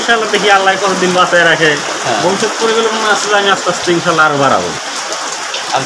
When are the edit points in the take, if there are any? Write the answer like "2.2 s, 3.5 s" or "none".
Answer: none